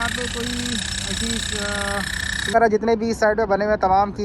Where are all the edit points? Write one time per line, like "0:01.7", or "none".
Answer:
0:02.5